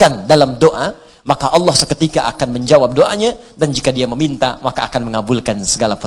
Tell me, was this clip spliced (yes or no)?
no